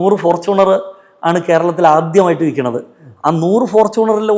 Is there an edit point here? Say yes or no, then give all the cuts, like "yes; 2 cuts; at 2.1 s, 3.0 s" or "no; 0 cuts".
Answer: no; 0 cuts